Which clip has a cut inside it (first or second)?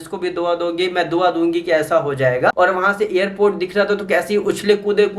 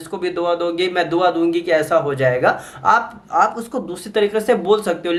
first